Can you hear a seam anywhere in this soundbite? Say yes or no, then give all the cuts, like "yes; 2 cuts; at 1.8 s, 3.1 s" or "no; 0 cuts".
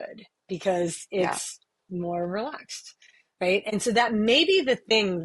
yes; 1 cut; at 3.7 s